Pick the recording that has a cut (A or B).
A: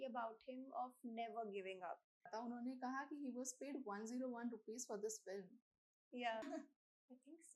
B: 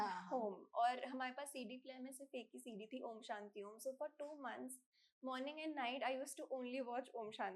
A